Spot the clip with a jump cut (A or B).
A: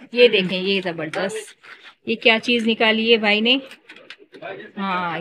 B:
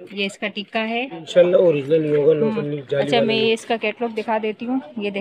B